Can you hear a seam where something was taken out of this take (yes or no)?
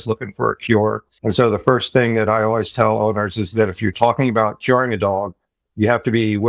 yes